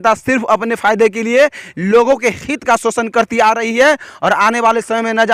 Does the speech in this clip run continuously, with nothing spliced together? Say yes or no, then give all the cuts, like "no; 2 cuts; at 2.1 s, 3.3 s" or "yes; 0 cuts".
yes; 0 cuts